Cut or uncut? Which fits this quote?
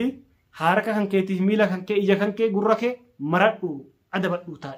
uncut